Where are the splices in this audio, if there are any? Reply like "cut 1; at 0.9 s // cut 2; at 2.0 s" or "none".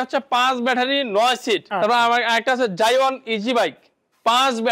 cut 1; at 1.7 s